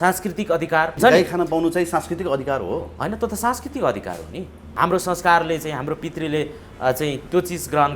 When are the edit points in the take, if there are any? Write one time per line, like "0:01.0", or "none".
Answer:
0:01.0
0:04.6